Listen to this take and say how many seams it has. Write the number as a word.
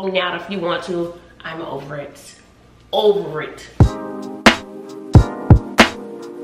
one